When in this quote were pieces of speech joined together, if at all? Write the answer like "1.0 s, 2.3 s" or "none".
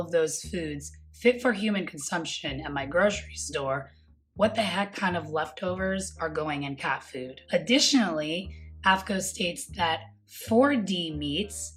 none